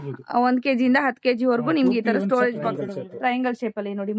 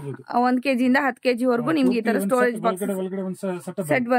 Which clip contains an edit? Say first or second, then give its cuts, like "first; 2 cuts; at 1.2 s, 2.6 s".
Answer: first; 1 cut; at 2.9 s